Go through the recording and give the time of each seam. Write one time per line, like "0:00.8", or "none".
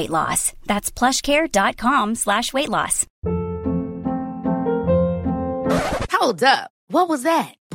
0:03.0